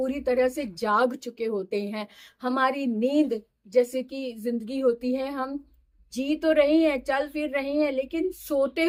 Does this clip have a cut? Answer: no; 0 cuts

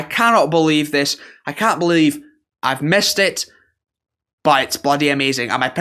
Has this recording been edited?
no; 0 cuts

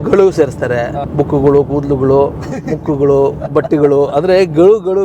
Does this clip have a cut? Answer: yes; 1 cut; at 0.9 s

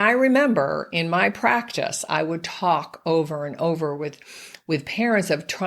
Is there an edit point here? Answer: no; 0 cuts

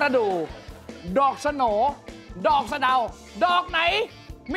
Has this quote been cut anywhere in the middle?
no; 0 cuts

